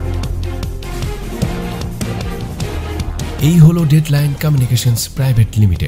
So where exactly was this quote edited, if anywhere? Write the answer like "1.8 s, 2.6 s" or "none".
none